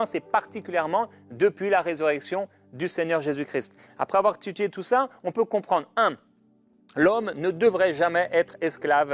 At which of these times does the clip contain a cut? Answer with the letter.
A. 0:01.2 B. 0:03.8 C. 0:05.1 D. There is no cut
B